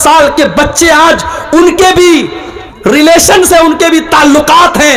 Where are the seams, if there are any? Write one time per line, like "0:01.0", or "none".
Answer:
none